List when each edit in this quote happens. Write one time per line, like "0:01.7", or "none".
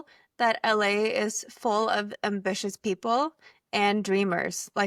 none